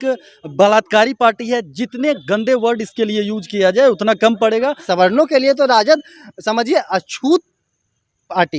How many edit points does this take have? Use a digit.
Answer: 1